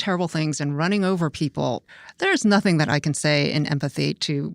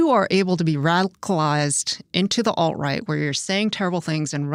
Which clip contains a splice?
first; 1 cut; at 1.8 s

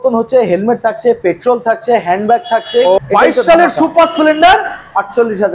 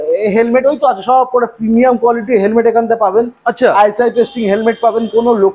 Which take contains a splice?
first; 1 cut; at 3.0 s

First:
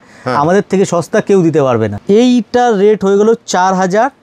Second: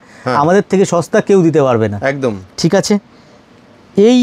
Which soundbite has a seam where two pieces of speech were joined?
first; 1 cut; at 1.9 s

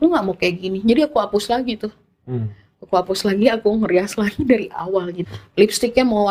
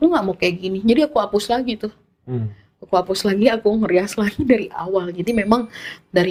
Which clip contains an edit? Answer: first; 1 cut; at 5.2 s

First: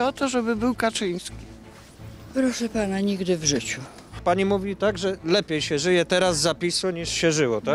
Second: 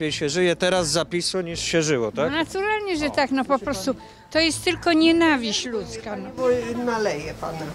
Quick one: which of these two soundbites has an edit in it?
first; 1 cut; at 4.0 s

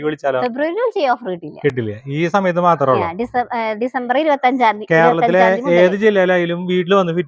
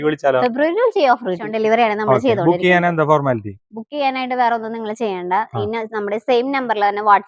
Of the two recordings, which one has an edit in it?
second; 1 cut; at 1.5 s

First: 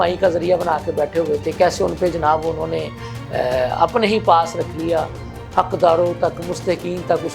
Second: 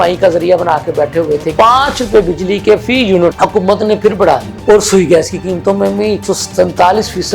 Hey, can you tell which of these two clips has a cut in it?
second; 3 cuts; at 1.5 s, 3.3 s, 4.5 s

